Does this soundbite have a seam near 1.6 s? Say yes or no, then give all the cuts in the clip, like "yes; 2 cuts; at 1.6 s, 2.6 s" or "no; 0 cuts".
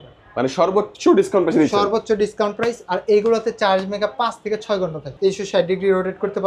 no; 1 cut; at 5.1 s